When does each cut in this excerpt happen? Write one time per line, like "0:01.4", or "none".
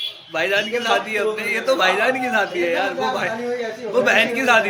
none